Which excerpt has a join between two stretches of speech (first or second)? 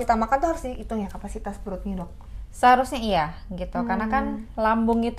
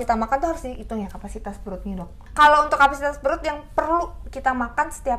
second